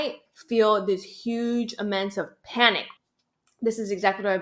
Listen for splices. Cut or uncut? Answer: cut